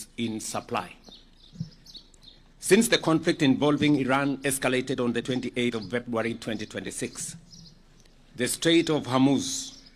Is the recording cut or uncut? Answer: uncut